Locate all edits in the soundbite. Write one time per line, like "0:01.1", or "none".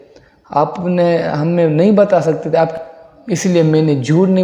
0:02.7